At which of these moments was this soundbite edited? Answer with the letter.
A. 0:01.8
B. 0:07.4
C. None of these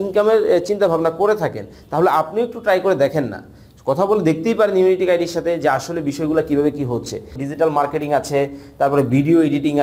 B